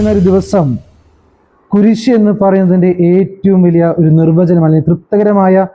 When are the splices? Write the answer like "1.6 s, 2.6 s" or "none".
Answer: none